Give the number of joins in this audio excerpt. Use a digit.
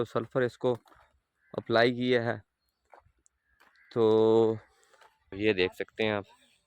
1